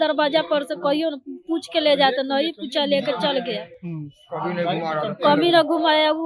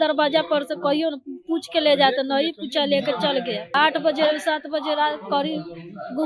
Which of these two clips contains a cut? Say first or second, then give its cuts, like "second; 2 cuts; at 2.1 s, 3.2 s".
second; 1 cut; at 3.7 s